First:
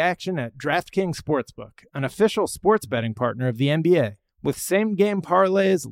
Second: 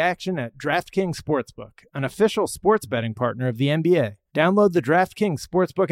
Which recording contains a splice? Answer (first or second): second